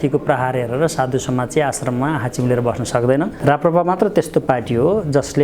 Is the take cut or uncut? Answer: cut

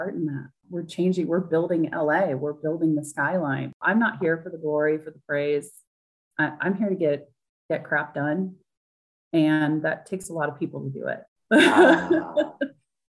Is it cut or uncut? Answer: cut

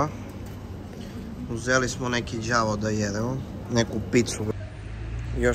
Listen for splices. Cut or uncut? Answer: cut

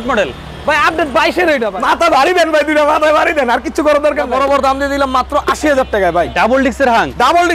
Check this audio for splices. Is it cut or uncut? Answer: cut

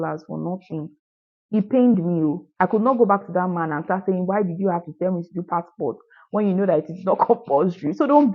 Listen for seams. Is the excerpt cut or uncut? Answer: cut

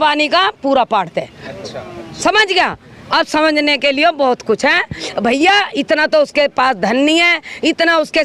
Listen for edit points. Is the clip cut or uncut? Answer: uncut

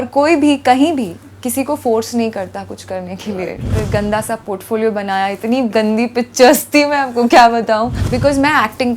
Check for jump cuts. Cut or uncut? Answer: cut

